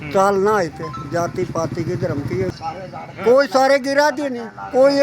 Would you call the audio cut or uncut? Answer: cut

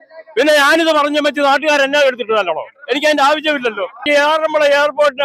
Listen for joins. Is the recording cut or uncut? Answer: cut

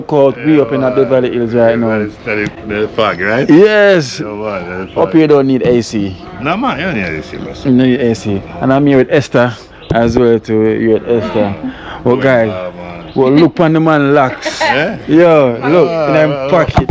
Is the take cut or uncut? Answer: uncut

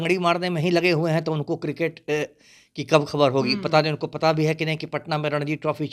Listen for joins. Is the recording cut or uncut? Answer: uncut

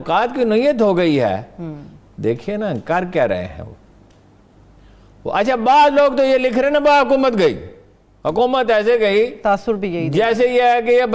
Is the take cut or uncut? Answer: uncut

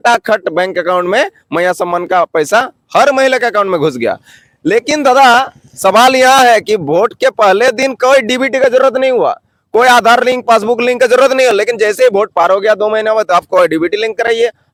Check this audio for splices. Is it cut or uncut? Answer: uncut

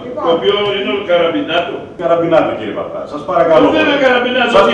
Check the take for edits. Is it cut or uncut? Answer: cut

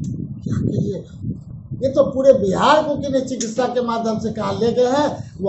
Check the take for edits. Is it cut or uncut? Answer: cut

